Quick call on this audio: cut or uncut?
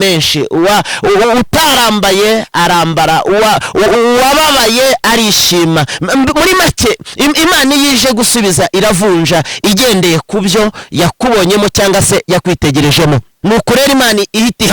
cut